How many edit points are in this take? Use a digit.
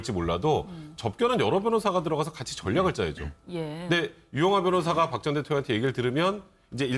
0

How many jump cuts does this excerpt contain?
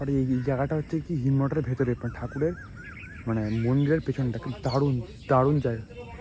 0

